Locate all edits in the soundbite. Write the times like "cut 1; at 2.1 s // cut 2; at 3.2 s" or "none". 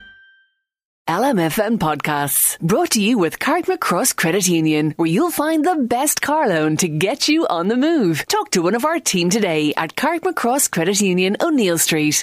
cut 1; at 1.0 s